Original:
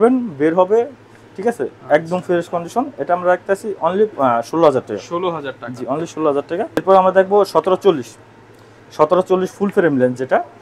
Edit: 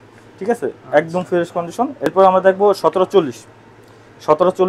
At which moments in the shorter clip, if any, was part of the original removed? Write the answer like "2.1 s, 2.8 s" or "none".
2.0 s